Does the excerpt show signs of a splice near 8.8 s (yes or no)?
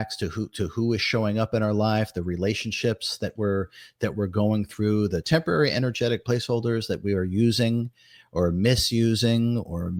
no